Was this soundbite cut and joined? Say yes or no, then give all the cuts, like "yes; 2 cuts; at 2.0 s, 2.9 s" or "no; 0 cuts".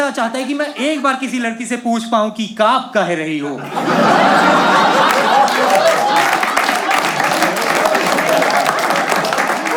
no; 0 cuts